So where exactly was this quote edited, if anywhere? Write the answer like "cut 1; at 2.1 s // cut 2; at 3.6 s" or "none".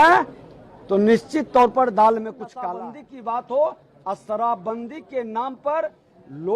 cut 1; at 2.6 s